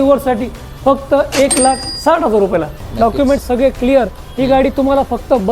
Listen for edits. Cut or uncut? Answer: cut